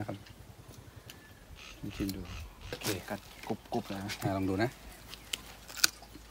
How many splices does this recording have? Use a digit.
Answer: 1